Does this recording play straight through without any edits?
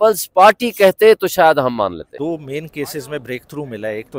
no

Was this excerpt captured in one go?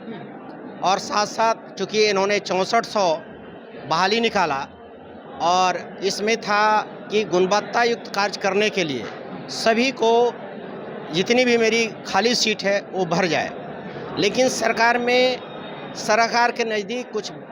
yes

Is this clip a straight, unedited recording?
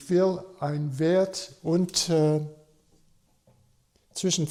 yes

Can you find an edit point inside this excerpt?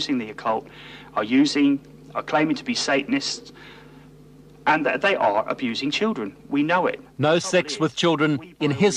no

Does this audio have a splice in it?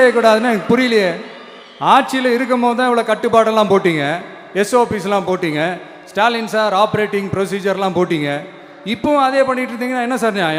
no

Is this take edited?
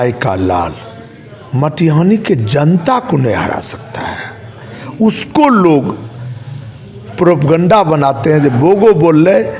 no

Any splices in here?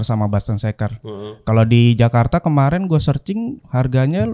no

